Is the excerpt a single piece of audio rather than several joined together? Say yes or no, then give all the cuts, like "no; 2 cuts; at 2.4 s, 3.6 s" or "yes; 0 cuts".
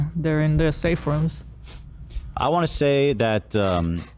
yes; 0 cuts